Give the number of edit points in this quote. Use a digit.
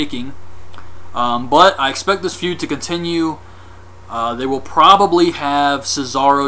0